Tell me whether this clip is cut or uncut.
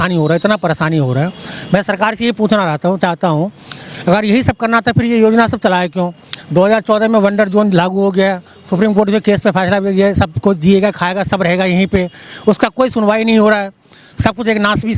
uncut